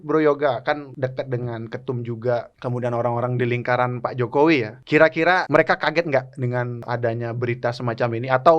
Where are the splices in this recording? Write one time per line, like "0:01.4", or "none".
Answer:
0:00.9
0:02.5
0:05.3
0:06.8